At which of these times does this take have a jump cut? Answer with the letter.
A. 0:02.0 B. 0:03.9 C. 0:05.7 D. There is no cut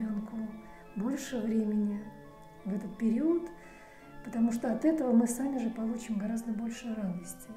D